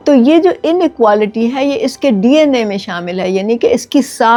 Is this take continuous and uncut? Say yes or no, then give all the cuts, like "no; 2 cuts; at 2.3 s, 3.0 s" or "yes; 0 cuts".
yes; 0 cuts